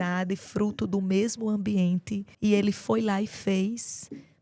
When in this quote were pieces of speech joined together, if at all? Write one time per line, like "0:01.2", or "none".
0:02.2